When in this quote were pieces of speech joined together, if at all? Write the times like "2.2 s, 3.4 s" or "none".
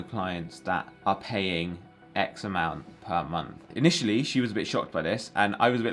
0.9 s